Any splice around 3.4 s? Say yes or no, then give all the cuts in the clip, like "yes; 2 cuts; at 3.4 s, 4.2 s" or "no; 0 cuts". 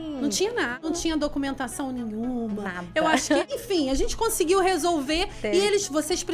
yes; 2 cuts; at 0.8 s, 3.4 s